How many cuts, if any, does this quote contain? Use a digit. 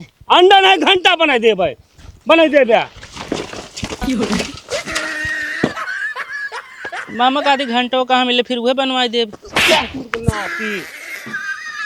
1